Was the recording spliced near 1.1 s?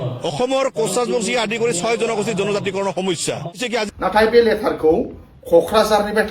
no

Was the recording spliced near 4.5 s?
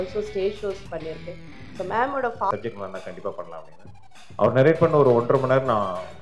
no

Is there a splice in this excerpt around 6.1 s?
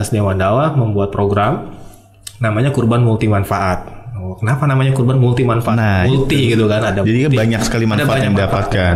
no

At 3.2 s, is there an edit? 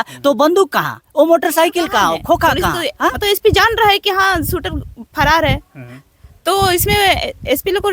yes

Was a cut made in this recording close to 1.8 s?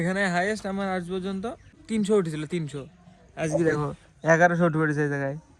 yes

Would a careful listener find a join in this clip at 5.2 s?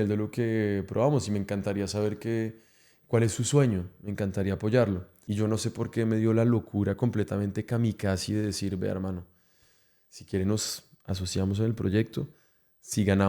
yes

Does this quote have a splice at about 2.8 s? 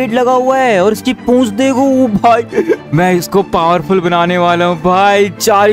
yes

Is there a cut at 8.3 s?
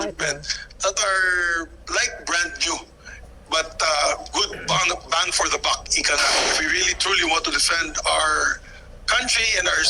no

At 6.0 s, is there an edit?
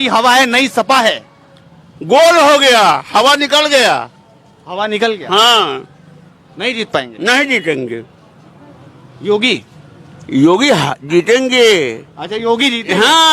no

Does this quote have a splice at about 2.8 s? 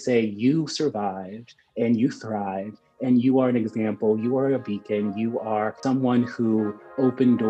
no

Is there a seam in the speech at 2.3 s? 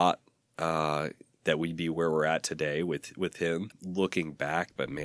no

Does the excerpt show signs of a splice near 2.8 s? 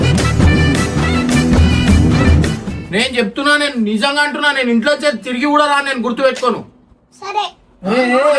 yes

